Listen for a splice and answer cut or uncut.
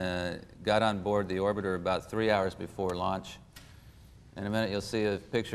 uncut